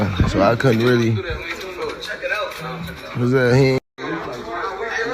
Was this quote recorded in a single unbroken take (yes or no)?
no